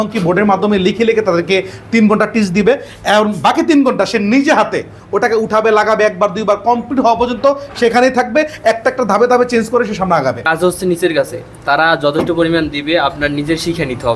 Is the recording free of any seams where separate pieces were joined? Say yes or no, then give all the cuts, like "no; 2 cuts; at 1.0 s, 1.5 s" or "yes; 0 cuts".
no; 1 cut; at 10.5 s